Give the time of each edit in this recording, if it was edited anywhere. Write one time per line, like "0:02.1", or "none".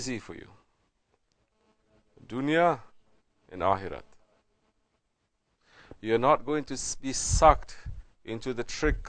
none